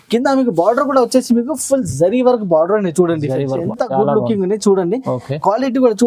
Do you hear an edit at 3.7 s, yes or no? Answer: yes